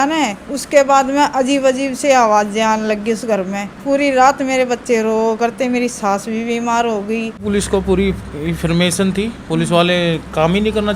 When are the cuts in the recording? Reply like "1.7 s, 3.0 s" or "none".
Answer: 3.7 s, 7.4 s